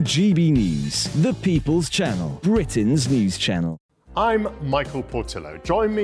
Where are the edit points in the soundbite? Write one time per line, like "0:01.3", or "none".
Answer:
0:03.8